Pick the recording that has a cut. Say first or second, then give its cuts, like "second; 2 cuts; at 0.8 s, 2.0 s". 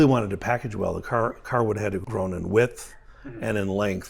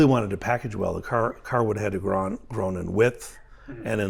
first; 1 cut; at 2.0 s